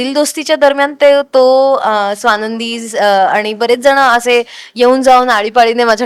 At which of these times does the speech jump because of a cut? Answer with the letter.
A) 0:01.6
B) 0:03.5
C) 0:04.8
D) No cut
D